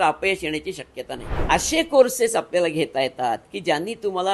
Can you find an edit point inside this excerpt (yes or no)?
yes